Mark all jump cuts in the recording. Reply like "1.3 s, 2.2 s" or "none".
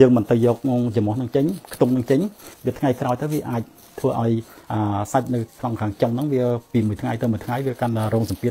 none

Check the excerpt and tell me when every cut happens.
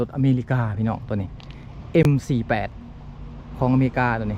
none

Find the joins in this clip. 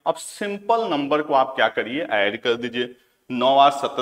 none

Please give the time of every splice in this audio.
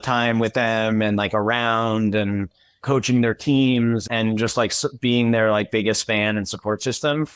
none

